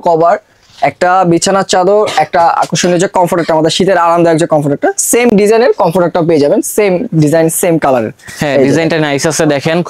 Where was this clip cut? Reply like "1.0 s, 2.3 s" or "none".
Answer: none